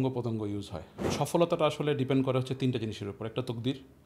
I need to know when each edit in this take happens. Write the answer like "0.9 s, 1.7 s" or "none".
1.1 s